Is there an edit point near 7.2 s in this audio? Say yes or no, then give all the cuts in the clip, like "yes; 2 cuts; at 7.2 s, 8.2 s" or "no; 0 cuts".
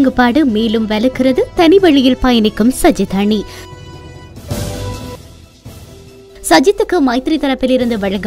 no; 0 cuts